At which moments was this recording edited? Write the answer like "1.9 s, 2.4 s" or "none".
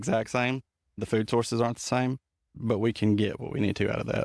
1.0 s, 2.4 s

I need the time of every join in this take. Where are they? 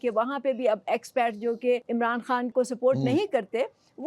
2.3 s

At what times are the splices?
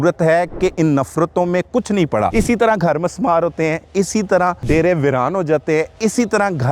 2.3 s, 4.6 s

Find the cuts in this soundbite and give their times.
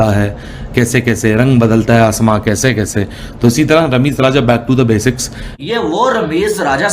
5.5 s

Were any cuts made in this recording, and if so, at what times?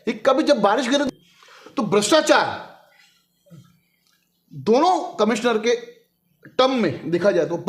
1.0 s

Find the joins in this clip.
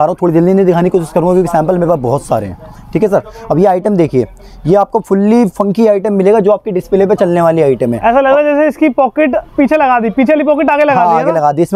none

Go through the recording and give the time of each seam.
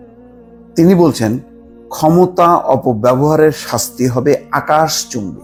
none

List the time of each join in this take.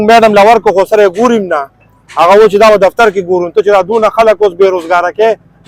none

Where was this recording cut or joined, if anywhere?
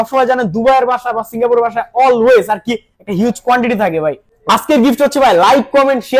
4.3 s

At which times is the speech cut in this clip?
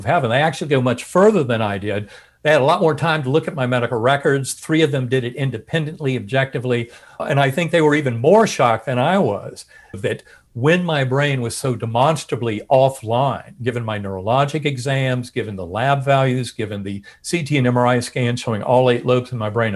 7.2 s, 10.0 s

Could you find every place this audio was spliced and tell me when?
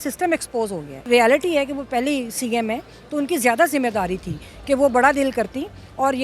1.0 s

